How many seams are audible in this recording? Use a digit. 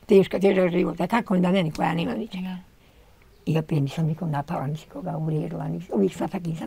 0